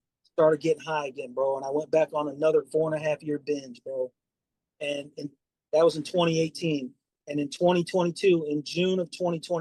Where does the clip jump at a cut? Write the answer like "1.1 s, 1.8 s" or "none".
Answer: none